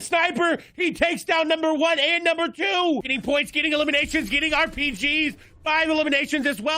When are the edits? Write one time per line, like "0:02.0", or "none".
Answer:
0:03.1